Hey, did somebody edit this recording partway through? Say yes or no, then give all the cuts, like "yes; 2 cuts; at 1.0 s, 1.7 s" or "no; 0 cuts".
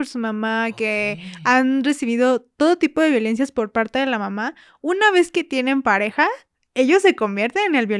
no; 0 cuts